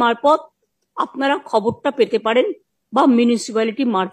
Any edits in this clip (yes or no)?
no